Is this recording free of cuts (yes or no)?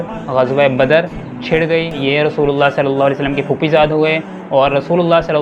no